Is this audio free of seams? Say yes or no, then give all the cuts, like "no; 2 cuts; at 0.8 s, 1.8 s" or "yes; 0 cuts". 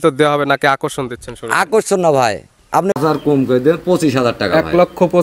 no; 1 cut; at 2.9 s